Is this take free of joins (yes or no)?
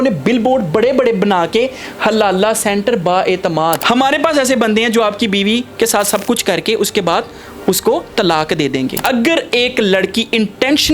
no